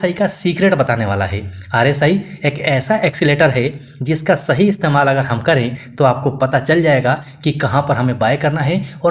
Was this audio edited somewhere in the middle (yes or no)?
no